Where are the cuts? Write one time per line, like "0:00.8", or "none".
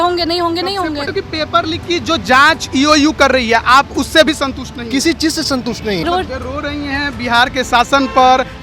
0:01.1
0:06.0